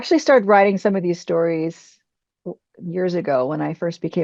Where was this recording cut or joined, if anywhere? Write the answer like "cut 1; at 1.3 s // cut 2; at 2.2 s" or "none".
none